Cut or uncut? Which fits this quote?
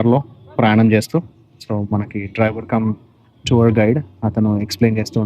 uncut